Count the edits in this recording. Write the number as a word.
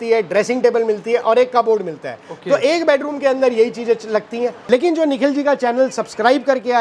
one